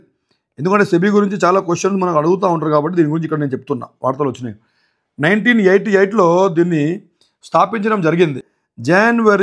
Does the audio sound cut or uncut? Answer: cut